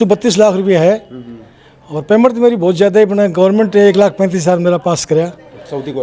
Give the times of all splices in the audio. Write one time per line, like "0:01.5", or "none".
none